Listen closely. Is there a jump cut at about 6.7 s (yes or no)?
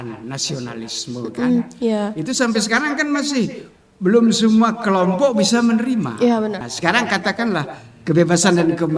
yes